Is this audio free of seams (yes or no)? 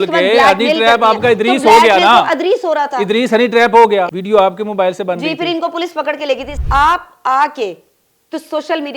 no